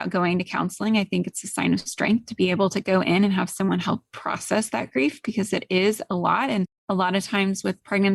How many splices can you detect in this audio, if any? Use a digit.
0